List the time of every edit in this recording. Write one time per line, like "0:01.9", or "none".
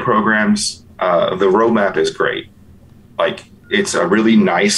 0:03.6